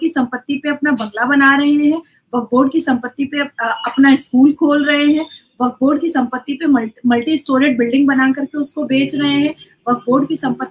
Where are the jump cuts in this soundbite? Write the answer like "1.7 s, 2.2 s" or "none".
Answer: none